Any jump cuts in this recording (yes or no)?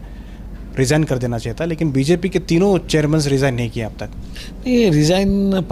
no